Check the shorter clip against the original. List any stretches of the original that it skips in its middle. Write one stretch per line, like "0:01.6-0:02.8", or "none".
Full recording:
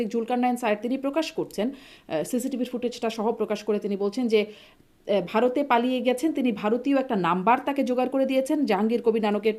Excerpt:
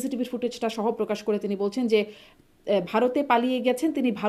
none